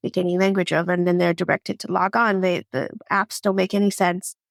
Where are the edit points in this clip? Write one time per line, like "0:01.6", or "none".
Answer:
none